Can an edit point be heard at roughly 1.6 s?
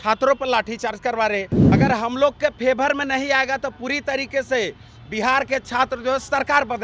yes; 1 cut; at 1.6 s

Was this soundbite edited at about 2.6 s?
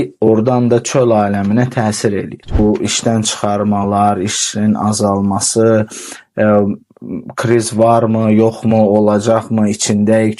yes; 1 cut; at 2.6 s

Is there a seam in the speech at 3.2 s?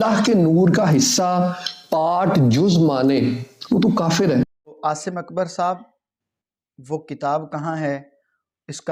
no; 1 cut; at 4.8 s

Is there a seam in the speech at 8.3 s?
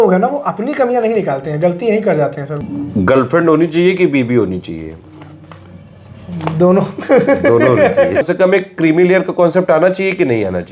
yes; 2 cuts; at 2.6 s, 8.3 s

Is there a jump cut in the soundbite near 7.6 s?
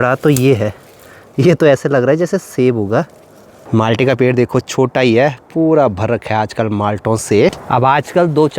yes; 2 cuts; at 3.5 s, 7.6 s

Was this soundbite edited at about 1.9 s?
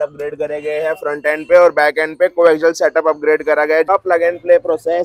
no; 1 cut; at 3.9 s

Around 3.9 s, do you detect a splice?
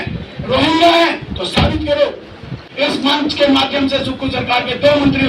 no; 1 cut; at 2.7 s

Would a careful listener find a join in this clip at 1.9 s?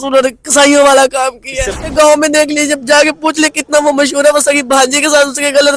yes; 1 cut; at 1.9 s

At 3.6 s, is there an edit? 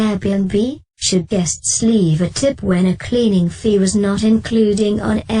no; 1 cut; at 0.9 s

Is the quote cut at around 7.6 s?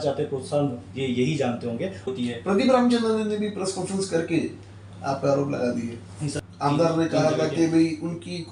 no; 2 cuts; at 2.1 s, 6.2 s

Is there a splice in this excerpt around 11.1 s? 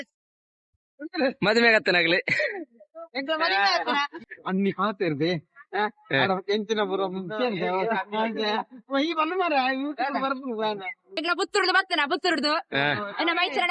yes; 2 cuts; at 4.2 s, 11.1 s

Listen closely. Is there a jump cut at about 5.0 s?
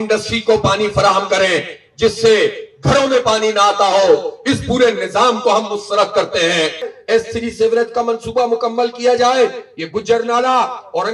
no; 1 cut; at 6.9 s

